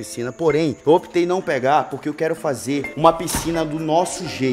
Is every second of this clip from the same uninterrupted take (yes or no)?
yes